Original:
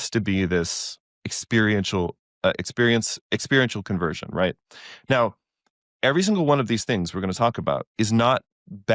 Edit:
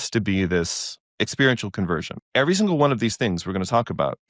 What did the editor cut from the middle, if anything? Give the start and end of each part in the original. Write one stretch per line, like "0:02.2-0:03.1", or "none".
0:01.0-0:03.2
0:04.2-0:05.8